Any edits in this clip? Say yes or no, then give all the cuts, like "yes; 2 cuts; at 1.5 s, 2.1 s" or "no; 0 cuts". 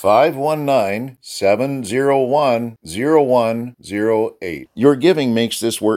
no; 0 cuts